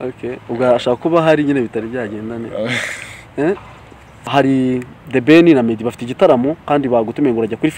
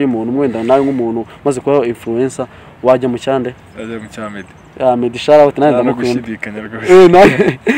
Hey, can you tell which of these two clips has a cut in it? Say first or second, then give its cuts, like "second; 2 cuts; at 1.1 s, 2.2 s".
first; 1 cut; at 4.3 s